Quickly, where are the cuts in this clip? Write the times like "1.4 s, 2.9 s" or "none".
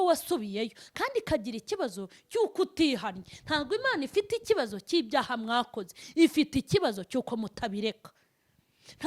none